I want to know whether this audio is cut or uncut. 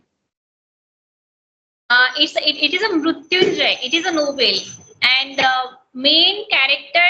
uncut